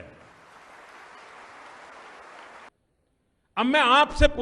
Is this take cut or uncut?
cut